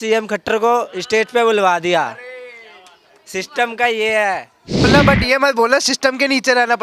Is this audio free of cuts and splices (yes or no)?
no